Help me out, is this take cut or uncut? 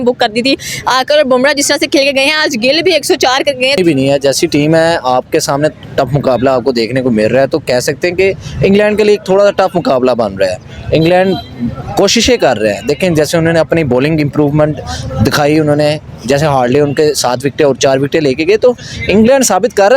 cut